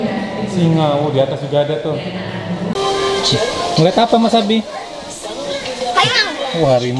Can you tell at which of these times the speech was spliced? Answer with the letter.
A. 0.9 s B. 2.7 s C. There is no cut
B